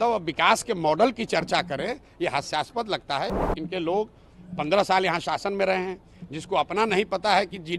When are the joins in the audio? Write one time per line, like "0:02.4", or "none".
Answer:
0:03.4